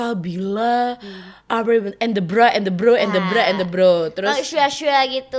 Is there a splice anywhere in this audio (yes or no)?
no